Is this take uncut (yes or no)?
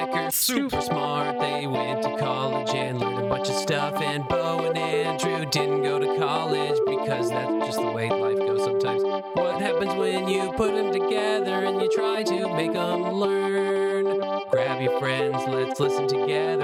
yes